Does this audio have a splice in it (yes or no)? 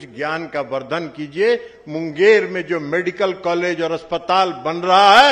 no